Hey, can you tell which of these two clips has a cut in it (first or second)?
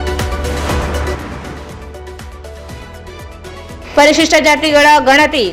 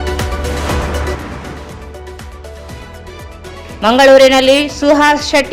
first